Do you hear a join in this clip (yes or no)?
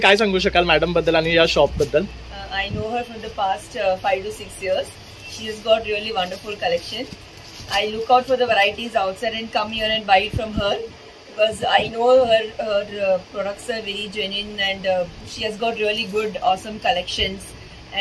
no